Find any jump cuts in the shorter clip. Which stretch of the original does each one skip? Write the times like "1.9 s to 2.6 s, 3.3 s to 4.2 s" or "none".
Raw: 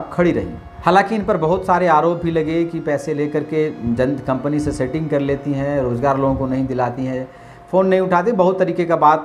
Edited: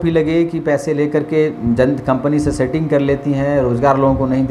none